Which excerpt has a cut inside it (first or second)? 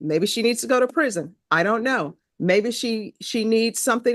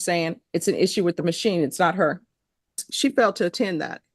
second